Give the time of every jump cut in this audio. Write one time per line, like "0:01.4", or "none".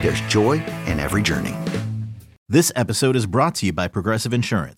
0:02.3